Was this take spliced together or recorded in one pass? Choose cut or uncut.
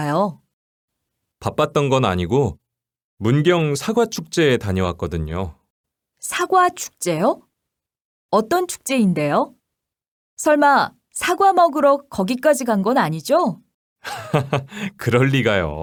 uncut